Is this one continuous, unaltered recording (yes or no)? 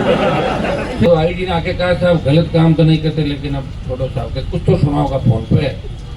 no